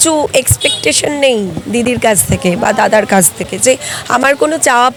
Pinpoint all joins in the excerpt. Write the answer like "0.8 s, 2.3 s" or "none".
none